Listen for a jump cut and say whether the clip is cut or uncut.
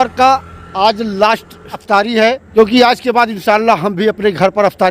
cut